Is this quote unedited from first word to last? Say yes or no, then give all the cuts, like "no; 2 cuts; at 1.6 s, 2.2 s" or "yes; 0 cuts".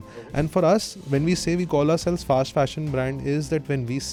yes; 0 cuts